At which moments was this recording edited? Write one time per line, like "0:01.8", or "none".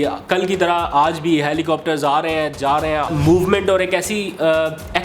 0:03.1